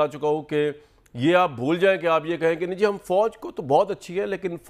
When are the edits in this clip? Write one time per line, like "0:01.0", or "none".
none